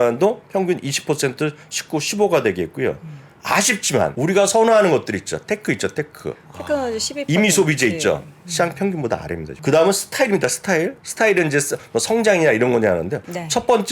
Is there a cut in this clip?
yes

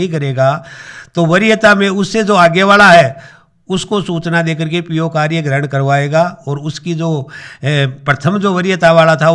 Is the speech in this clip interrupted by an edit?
no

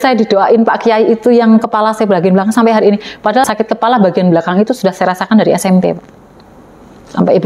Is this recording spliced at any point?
yes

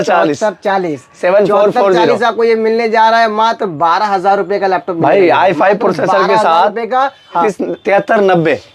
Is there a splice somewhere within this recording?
yes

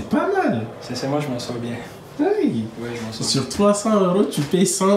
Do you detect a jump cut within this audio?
no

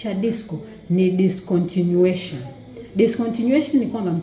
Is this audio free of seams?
yes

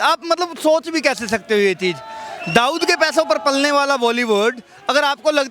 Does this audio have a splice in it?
no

